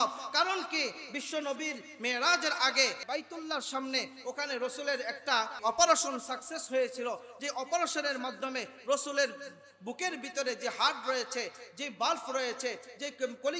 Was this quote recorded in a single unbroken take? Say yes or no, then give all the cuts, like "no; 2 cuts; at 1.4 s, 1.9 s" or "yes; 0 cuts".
no; 2 cuts; at 3.0 s, 5.6 s